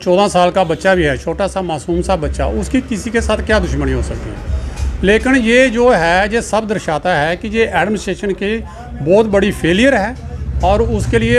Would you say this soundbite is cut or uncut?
uncut